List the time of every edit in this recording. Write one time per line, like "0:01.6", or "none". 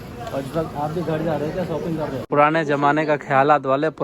0:02.3